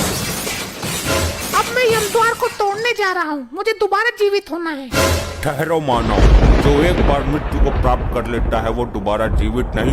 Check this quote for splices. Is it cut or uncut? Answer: cut